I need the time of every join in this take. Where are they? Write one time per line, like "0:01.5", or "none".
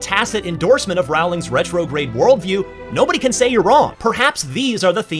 0:03.9